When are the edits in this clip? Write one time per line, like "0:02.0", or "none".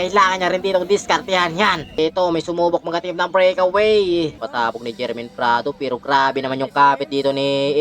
0:02.0
0:04.4